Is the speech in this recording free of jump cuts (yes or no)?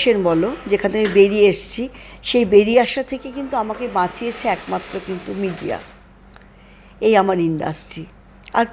yes